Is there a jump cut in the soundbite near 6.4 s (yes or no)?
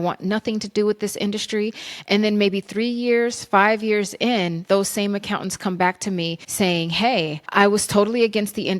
yes